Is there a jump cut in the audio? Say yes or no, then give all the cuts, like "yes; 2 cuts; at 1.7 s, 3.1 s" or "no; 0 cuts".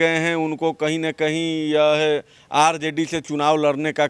no; 0 cuts